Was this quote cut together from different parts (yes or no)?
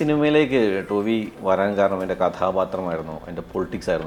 no